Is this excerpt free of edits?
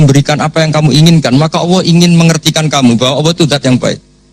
yes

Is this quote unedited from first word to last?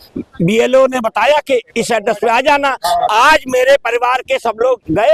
yes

